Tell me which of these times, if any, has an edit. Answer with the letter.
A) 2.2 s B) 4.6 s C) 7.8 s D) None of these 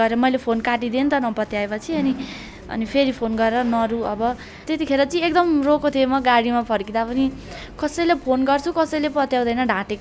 B